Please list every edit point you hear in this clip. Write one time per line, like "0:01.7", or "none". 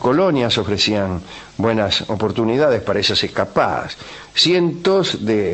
0:03.9